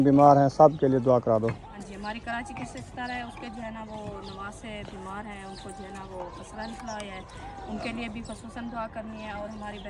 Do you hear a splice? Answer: yes; 2 cuts; at 1.7 s, 7.3 s

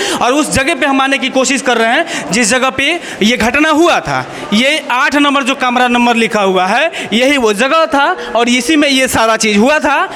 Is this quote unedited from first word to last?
yes; 0 cuts

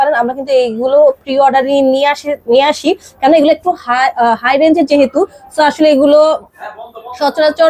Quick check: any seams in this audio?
no; 0 cuts

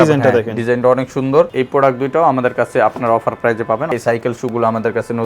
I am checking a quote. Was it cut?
yes; 2 cuts; at 1.5 s, 3.9 s

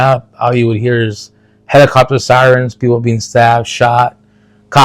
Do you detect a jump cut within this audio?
no; 0 cuts

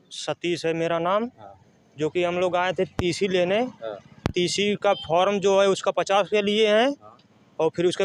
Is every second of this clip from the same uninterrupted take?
yes; 0 cuts

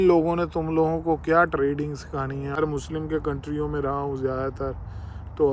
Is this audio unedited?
no; 1 cut; at 2.5 s

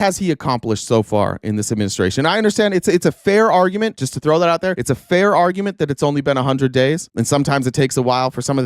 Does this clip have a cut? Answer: yes; 2 cuts; at 4.1 s, 4.8 s

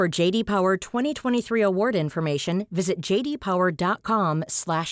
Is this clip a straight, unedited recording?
yes; 0 cuts

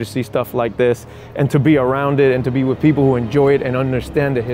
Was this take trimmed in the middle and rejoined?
no; 0 cuts

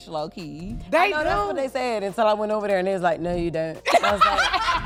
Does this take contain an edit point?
no; 0 cuts

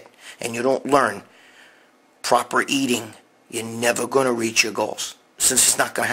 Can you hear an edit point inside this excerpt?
no; 0 cuts

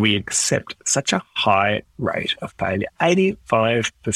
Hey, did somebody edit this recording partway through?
no; 0 cuts

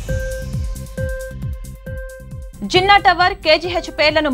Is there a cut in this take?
no; 0 cuts

